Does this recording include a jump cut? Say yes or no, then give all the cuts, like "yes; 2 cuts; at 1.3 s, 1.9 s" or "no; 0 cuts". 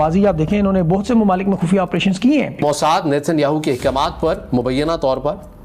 yes; 1 cut; at 2.6 s